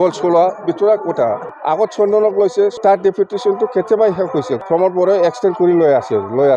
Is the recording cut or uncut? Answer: cut